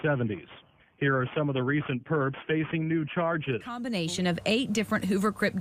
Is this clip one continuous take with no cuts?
no; 1 cut; at 3.8 s

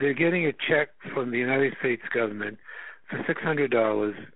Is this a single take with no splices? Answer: yes; 0 cuts

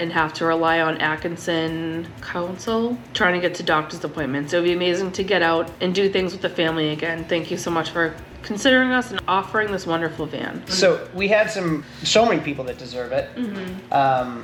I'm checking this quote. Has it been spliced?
no; 0 cuts

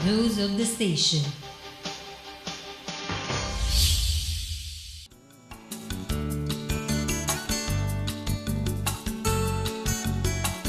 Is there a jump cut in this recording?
yes; 1 cut; at 6.1 s

